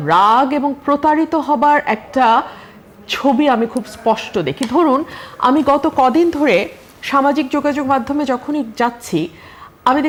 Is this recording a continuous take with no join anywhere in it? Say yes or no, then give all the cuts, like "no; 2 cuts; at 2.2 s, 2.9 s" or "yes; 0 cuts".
yes; 0 cuts